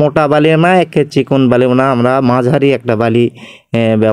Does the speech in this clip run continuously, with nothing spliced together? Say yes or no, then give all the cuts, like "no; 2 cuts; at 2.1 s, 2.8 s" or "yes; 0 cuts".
yes; 0 cuts